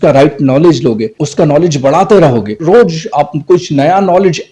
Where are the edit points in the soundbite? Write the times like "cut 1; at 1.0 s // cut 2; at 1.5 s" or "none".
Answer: cut 1; at 1.2 s // cut 2; at 2.5 s